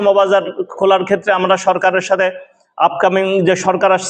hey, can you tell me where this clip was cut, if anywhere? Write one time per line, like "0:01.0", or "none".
none